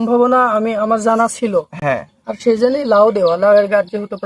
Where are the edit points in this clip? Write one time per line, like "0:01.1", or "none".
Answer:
none